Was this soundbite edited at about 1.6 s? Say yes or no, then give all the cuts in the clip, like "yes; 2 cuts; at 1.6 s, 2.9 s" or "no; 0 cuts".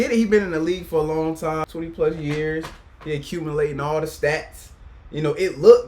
yes; 1 cut; at 1.6 s